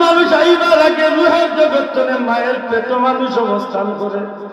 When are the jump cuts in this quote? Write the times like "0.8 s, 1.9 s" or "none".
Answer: none